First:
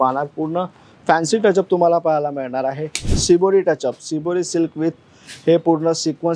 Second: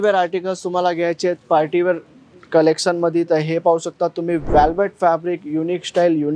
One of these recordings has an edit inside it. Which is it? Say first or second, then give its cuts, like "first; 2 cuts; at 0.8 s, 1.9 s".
first; 1 cut; at 3.1 s